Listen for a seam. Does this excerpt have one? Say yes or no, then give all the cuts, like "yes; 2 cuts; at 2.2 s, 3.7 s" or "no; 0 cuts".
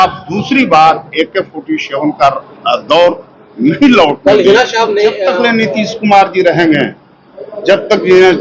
yes; 1 cut; at 5.2 s